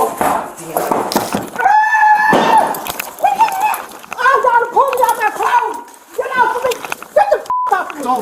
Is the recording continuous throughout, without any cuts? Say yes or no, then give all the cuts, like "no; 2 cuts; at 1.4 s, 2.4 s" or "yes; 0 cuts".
no; 1 cut; at 1.1 s